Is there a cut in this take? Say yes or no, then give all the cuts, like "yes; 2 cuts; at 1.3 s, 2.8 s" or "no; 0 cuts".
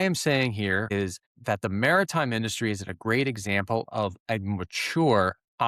yes; 1 cut; at 1.0 s